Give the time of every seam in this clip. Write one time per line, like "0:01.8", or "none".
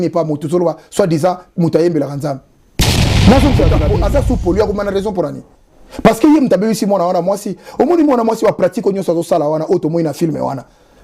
0:03.9